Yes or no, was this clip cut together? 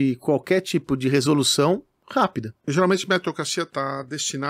yes